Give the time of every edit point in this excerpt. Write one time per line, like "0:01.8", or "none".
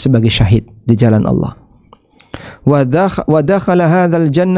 none